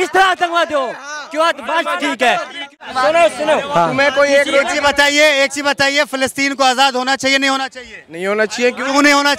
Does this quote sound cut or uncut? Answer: cut